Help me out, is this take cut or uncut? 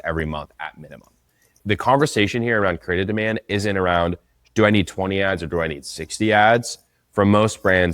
cut